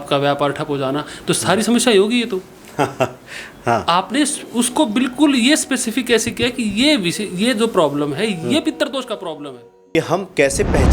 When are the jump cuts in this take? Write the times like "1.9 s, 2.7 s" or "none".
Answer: 9.9 s